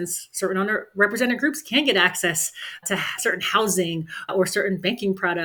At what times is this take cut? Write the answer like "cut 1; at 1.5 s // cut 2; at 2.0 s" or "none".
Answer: none